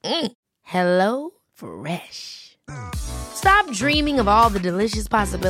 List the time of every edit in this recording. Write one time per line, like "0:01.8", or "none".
none